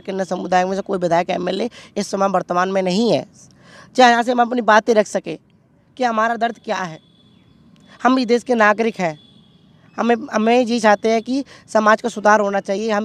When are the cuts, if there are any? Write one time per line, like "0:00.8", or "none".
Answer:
none